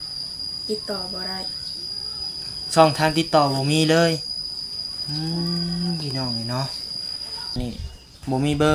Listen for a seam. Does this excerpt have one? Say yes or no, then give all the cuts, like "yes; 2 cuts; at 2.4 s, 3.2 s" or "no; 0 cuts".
yes; 1 cut; at 7.6 s